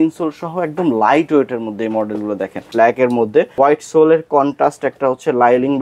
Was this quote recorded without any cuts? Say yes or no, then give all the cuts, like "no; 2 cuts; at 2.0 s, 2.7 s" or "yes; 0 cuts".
no; 2 cuts; at 2.6 s, 3.5 s